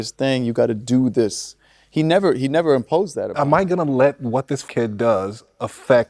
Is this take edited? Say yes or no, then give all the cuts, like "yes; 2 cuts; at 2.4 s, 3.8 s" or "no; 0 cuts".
yes; 2 cuts; at 3.3 s, 4.6 s